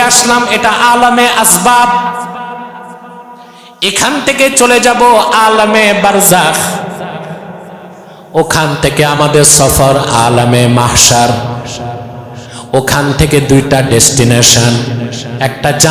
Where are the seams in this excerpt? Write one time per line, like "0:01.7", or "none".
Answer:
none